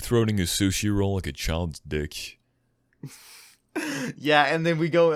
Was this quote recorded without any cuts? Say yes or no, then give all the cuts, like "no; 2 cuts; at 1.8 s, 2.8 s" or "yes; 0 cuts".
yes; 0 cuts